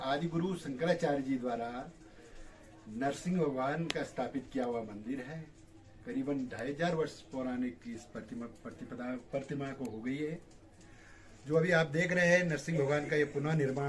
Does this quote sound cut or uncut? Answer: uncut